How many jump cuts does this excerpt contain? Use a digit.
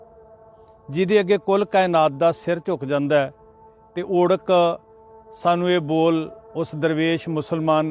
1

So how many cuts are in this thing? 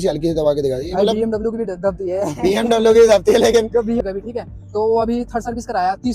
1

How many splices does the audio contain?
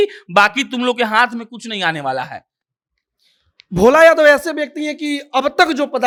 0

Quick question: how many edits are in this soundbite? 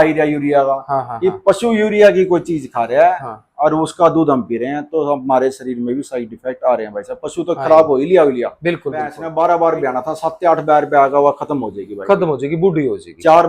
1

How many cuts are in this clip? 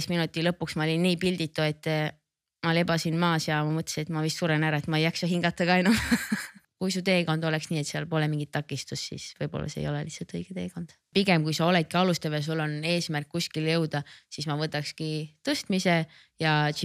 2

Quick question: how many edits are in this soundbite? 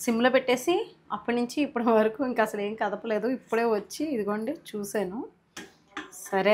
0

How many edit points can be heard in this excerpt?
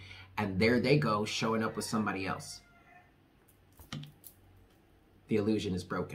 0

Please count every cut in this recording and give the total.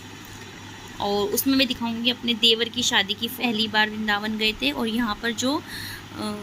1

